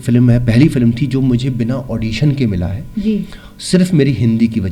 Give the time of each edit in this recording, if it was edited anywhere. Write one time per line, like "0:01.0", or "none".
none